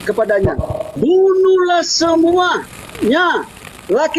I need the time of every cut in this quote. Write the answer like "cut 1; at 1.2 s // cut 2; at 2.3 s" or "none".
cut 1; at 1.0 s